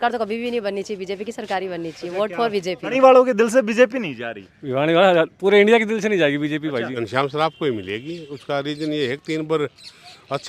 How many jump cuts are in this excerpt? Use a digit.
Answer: 2